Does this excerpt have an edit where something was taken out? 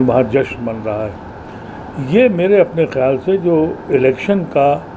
no; 0 cuts

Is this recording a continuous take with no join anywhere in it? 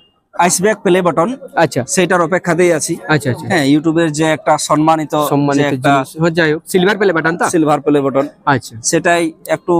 yes; 0 cuts

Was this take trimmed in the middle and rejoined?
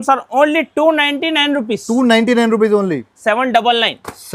yes; 1 cut; at 3.2 s

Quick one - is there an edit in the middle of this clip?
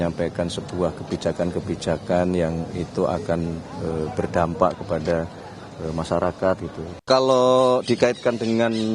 yes; 1 cut; at 7.1 s

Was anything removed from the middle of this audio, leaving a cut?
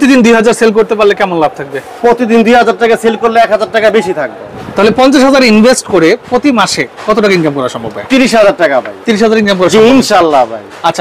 no; 0 cuts

